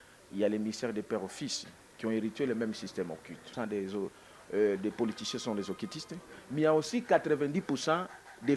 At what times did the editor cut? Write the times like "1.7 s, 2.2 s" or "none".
3.4 s